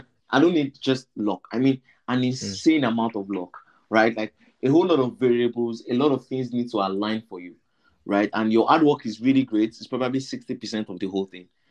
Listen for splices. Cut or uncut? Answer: uncut